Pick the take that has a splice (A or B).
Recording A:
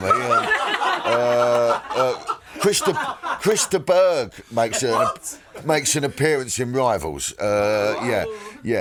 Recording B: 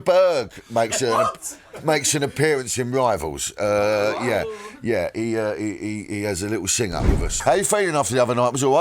B